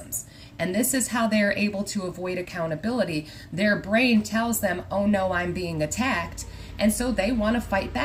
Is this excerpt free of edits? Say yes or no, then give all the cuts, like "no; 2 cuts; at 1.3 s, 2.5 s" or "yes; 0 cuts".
yes; 0 cuts